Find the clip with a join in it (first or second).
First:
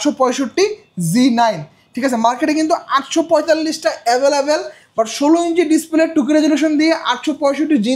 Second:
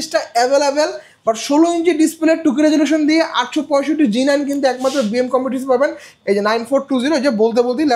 second